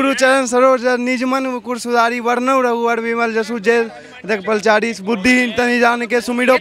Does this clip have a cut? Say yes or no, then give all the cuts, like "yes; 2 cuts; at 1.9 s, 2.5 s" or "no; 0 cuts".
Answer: no; 0 cuts